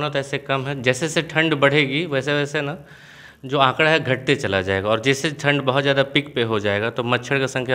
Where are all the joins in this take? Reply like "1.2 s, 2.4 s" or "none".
none

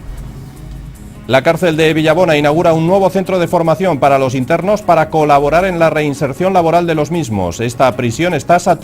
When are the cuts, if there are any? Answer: 6.3 s

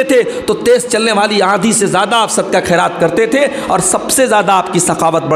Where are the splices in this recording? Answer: none

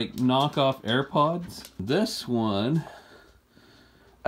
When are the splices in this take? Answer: 1.8 s

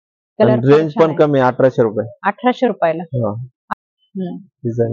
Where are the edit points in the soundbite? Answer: 3.5 s

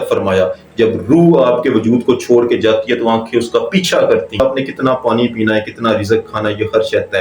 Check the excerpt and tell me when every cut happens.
4.4 s

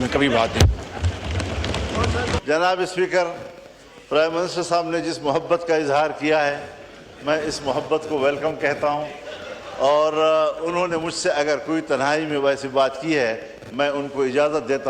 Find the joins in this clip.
2.4 s

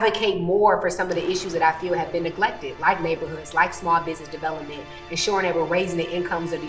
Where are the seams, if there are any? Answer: none

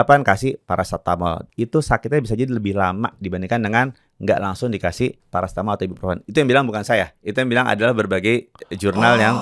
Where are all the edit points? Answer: 1.5 s, 5.2 s

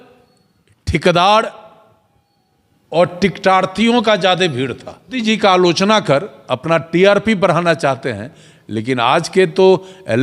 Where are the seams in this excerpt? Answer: 5.2 s

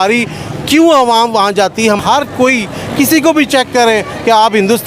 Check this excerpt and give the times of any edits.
2.0 s

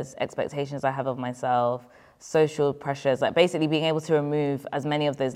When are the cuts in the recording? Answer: none

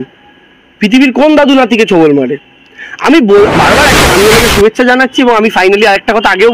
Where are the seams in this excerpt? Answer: 4.1 s

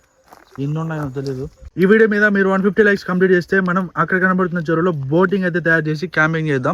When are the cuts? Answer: 1.6 s

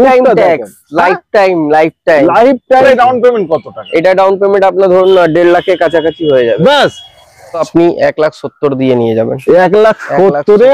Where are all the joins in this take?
2.9 s, 7.7 s

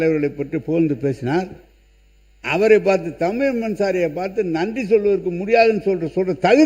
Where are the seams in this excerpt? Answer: none

